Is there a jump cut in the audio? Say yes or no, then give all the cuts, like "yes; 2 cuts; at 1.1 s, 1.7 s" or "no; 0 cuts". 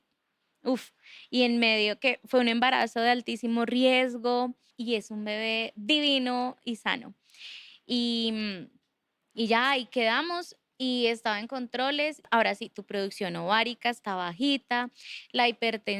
yes; 2 cuts; at 4.7 s, 12.2 s